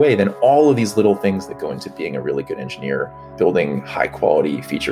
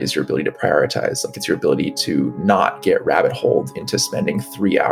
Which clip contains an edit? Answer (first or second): first